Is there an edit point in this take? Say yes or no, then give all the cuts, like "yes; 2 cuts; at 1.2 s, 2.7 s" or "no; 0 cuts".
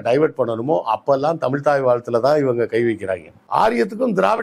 yes; 1 cut; at 3.4 s